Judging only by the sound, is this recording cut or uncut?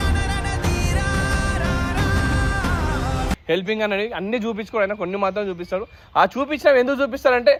uncut